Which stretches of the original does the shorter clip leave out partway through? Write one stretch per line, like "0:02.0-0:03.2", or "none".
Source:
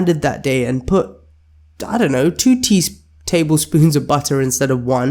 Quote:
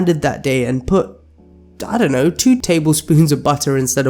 0:02.6-0:03.3